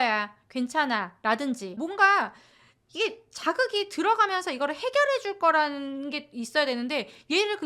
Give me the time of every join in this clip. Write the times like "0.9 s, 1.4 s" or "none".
1.8 s